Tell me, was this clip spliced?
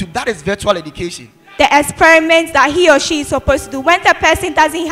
yes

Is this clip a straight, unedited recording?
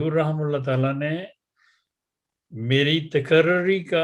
yes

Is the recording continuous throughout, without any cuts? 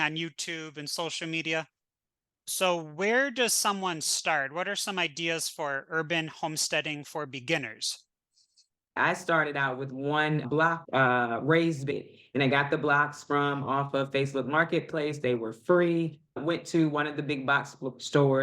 no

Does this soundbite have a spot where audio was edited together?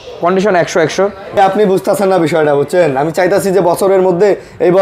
yes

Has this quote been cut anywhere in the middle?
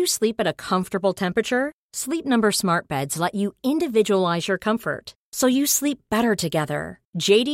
no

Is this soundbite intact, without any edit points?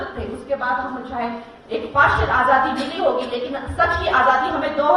yes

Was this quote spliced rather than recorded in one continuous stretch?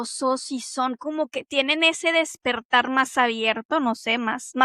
no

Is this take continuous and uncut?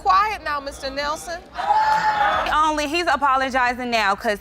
no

